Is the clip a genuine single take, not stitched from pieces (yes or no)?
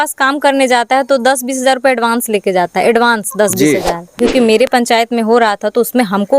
no